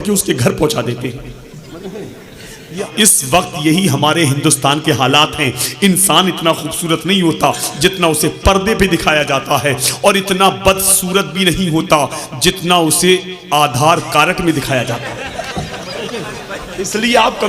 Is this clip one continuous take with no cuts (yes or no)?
no